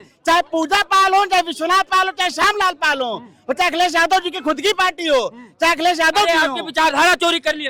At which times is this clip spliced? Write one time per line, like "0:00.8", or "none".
none